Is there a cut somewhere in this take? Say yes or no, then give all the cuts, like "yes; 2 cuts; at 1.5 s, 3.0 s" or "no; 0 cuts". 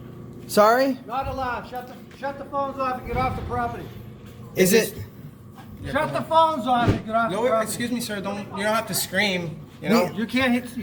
no; 0 cuts